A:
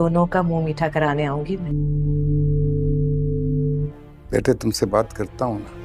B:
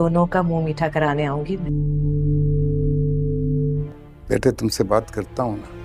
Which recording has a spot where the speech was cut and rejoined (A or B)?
B